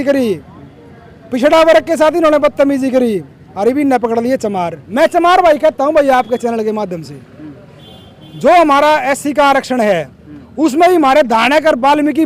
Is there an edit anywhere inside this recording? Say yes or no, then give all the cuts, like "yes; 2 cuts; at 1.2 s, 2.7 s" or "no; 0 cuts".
yes; 1 cut; at 4.8 s